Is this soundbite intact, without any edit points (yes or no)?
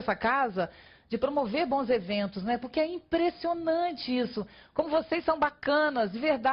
no